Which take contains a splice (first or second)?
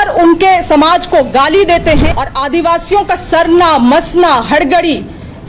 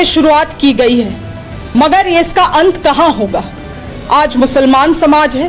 first